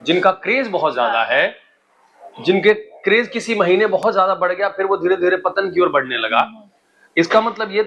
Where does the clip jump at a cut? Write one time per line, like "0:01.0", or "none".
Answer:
none